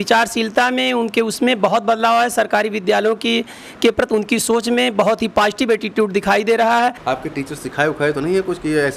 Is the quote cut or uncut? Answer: cut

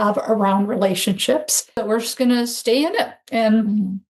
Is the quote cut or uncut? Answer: cut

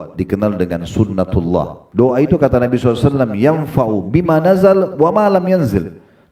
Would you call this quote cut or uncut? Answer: cut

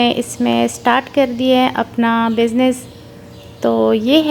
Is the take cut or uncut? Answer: uncut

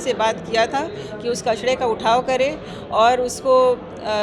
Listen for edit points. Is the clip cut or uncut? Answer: uncut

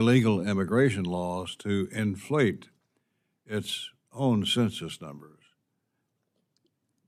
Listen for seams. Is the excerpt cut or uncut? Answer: uncut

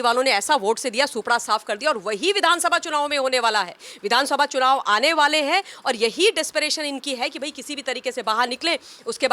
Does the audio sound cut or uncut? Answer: uncut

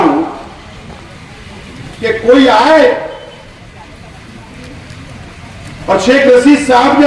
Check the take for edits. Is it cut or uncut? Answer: uncut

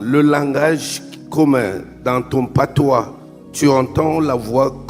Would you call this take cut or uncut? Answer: uncut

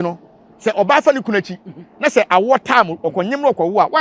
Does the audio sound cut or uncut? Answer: uncut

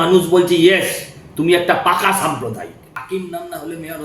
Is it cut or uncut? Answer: cut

